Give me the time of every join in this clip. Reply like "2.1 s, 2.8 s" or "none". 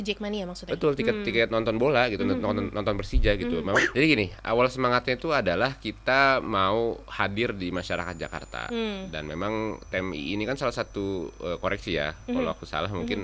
3.8 s

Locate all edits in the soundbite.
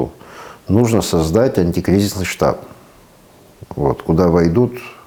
none

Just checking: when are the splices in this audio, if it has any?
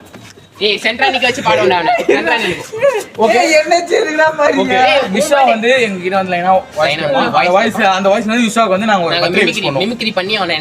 none

